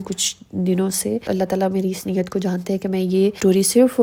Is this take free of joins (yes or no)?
yes